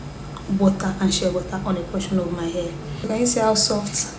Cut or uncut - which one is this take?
cut